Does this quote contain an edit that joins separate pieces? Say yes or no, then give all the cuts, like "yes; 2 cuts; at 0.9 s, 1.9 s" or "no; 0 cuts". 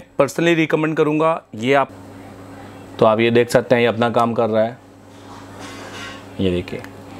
yes; 1 cut; at 1.9 s